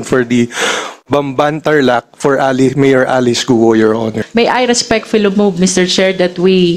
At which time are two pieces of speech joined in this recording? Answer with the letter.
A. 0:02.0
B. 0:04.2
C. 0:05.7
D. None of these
B